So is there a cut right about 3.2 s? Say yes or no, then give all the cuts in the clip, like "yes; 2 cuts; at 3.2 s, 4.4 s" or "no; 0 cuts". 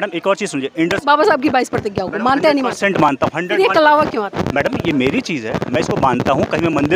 no; 0 cuts